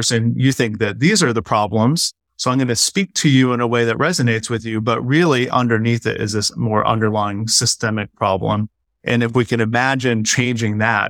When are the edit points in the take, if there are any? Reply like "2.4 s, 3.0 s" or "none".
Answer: none